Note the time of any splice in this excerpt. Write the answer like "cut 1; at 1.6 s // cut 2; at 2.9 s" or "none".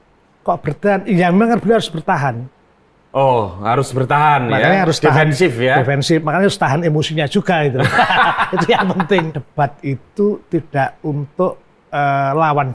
cut 1; at 9.4 s